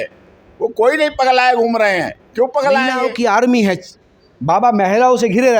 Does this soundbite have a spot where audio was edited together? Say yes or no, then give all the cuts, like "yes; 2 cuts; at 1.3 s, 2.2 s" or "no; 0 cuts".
yes; 1 cut; at 3.0 s